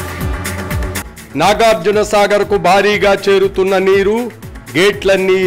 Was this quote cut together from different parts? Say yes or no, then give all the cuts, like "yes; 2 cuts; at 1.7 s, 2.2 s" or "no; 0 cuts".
no; 0 cuts